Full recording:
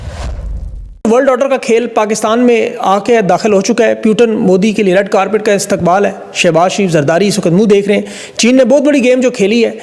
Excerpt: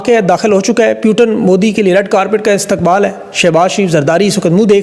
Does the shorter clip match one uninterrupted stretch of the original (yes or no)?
yes